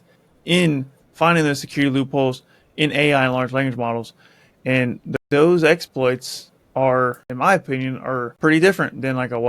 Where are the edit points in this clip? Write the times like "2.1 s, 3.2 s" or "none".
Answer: 5.1 s, 7.2 s, 8.3 s